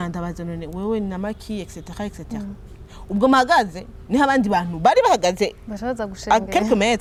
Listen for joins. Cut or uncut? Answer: uncut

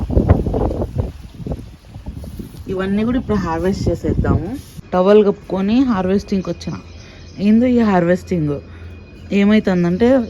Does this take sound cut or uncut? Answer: cut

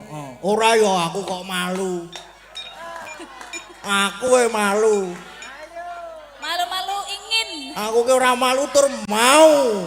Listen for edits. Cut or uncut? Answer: uncut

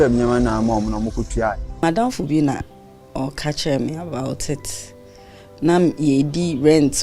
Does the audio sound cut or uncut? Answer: cut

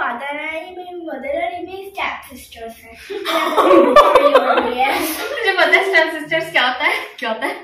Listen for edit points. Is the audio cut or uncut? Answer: uncut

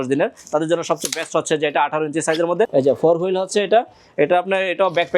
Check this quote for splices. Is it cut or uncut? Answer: cut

